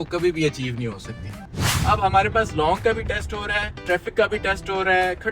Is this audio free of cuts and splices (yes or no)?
no